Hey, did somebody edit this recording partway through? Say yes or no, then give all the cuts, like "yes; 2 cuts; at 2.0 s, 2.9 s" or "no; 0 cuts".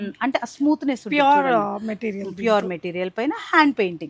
no; 0 cuts